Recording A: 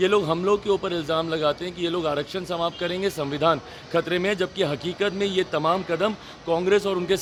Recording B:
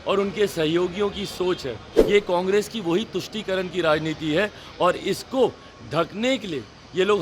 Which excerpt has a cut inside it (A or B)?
B